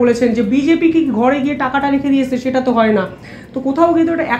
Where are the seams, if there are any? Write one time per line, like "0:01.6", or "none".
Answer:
none

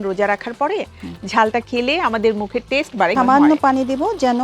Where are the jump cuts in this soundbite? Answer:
0:03.1

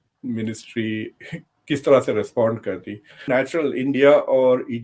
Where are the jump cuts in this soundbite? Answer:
0:03.2

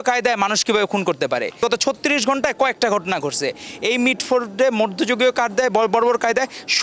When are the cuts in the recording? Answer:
none

